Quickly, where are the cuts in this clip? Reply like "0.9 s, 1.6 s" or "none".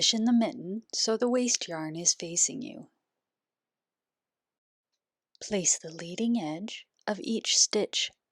4.8 s